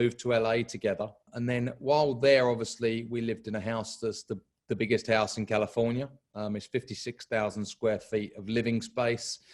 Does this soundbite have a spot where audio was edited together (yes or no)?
yes